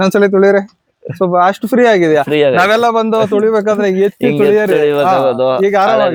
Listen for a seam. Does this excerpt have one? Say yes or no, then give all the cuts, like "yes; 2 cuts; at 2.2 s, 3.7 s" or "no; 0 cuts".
no; 0 cuts